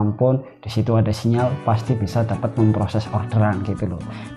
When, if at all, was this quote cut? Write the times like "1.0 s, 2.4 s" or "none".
none

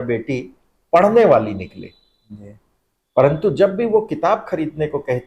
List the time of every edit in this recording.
none

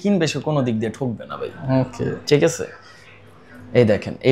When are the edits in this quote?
none

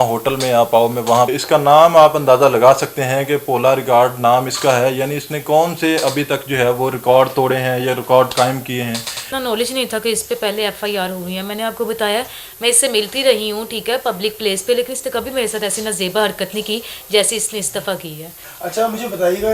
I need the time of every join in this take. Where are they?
1.4 s, 9.3 s, 18.4 s

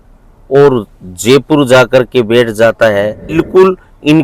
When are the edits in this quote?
3.3 s

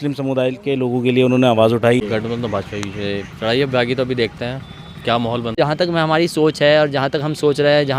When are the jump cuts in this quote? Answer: 2.0 s, 5.5 s

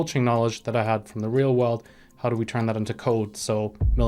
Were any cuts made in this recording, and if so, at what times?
none

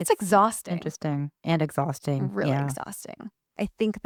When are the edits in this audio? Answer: none

